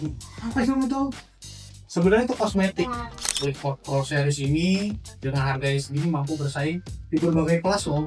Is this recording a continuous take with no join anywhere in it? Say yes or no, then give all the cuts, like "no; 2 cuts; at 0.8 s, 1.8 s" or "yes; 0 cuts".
no; 1 cut; at 3.2 s